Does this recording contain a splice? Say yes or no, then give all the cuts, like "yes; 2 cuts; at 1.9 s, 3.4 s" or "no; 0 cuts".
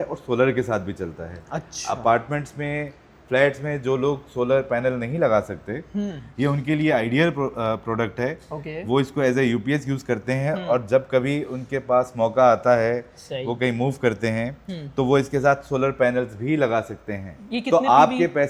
no; 0 cuts